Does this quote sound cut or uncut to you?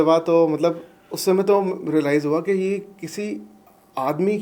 uncut